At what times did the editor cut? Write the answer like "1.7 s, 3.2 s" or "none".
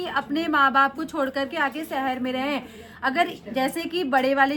none